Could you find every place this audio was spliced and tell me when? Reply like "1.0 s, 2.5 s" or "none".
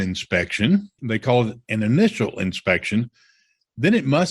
1.0 s